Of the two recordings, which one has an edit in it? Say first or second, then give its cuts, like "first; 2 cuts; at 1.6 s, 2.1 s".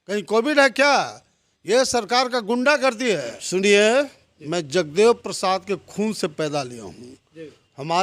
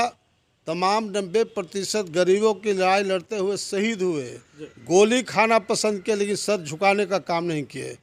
first; 1 cut; at 3.3 s